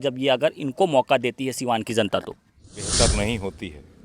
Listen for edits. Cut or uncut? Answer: cut